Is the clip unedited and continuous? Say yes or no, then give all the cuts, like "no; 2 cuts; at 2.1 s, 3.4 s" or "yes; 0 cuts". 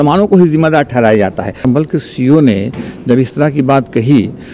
no; 1 cut; at 1.6 s